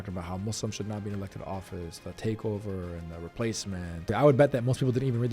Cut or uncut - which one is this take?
cut